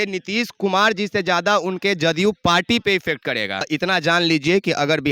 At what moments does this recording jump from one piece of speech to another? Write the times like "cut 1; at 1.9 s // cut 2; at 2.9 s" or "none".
cut 1; at 3.6 s